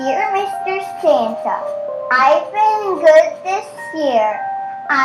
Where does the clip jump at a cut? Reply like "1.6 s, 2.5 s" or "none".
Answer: none